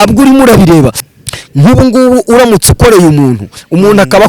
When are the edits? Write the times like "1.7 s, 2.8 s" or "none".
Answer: 1.0 s

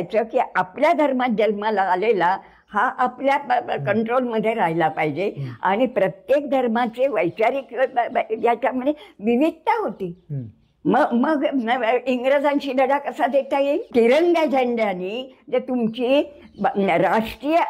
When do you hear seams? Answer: 13.9 s

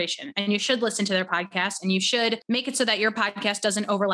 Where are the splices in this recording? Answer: 2.4 s

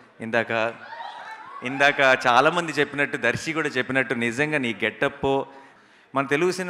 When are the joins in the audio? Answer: 5.8 s

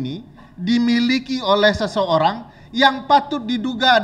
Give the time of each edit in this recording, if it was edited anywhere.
none

